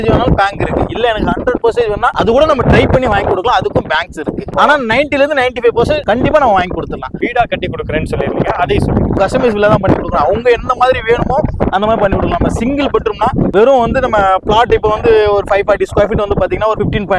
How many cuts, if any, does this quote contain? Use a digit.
0